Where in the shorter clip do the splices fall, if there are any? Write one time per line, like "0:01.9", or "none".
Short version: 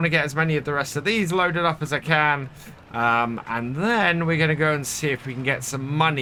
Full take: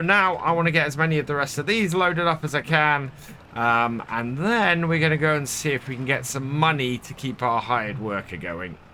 none